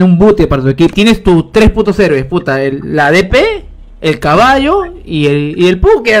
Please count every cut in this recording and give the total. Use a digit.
1